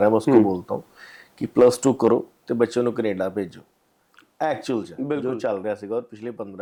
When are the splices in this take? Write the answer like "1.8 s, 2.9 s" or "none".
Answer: none